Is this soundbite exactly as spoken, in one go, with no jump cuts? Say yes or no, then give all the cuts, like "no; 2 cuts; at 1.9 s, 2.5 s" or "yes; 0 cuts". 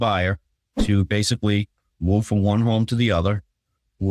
yes; 0 cuts